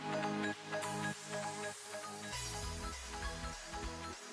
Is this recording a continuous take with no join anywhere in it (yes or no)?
yes